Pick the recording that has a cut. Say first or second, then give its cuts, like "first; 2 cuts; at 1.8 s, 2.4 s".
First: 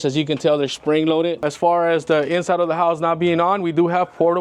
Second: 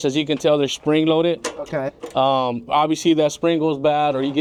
first; 1 cut; at 1.4 s